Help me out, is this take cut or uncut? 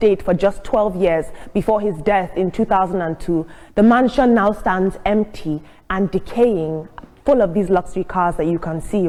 uncut